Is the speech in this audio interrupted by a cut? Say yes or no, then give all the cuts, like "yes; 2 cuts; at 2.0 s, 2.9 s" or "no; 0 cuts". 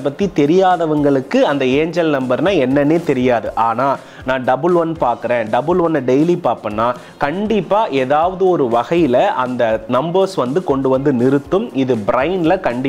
no; 0 cuts